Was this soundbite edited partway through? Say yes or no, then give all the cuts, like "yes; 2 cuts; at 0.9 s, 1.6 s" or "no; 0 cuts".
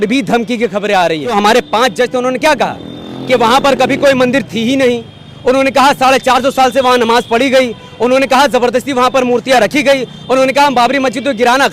yes; 1 cut; at 1.3 s